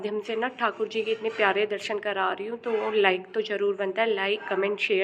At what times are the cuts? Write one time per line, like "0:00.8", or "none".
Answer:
none